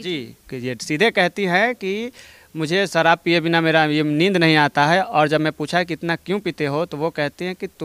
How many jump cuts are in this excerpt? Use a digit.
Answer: 0